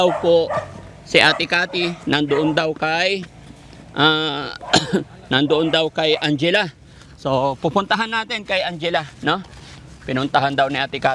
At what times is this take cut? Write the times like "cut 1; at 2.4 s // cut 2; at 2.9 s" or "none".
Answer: none